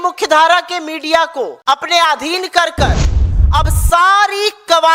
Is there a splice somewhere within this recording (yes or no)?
yes